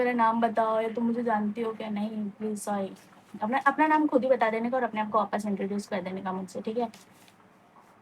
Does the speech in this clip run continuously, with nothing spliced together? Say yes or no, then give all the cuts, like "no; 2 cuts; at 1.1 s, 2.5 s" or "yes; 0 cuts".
yes; 0 cuts